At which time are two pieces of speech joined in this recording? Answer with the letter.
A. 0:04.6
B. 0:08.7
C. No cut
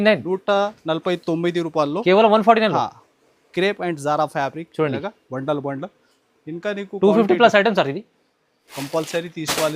B